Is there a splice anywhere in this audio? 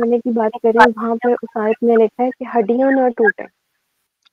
no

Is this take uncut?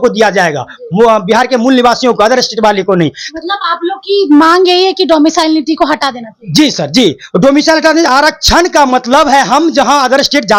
yes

